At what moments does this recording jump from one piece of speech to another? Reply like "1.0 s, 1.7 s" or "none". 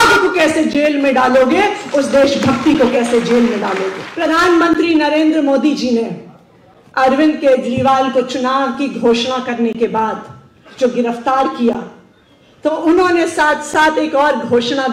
4.0 s